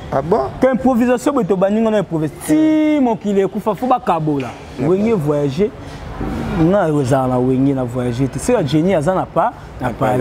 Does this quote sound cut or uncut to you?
cut